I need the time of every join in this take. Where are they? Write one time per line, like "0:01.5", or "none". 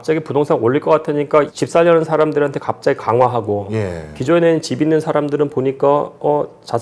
0:01.6